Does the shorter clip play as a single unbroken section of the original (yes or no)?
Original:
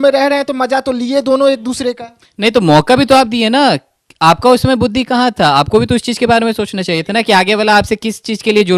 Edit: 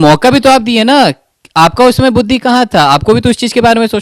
yes